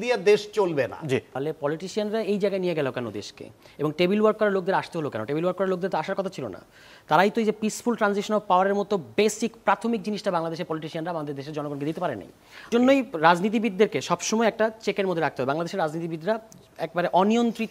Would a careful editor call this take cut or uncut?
cut